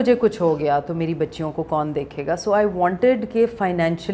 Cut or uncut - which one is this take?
uncut